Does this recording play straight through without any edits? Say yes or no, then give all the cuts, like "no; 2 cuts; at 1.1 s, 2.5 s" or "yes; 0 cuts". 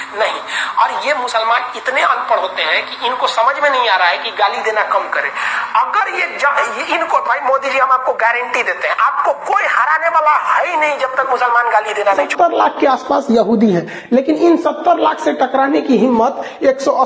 no; 1 cut; at 12.3 s